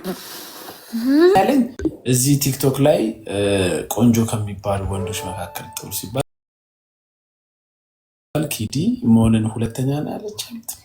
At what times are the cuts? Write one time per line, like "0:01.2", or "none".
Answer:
0:01.3